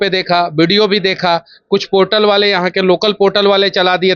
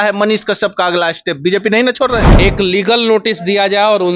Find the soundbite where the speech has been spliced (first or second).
second